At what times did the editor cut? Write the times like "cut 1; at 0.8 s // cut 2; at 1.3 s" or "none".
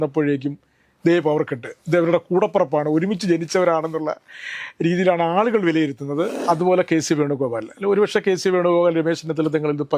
cut 1; at 6.3 s